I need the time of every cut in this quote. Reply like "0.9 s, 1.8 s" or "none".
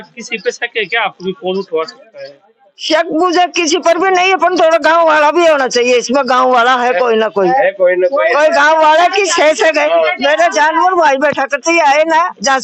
none